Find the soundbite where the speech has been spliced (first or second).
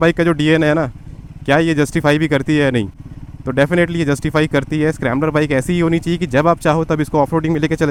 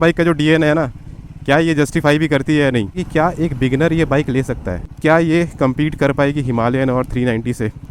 second